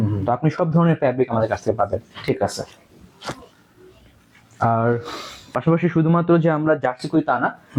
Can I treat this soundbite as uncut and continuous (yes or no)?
yes